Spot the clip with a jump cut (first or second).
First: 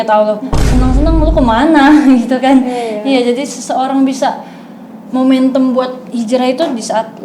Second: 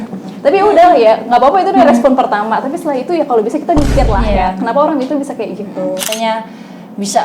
second